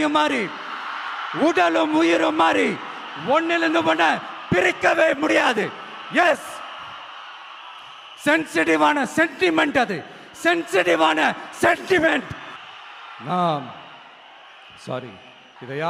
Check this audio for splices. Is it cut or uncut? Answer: uncut